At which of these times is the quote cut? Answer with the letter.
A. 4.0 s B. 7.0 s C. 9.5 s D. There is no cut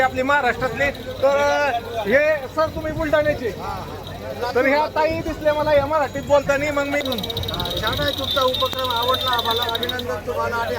B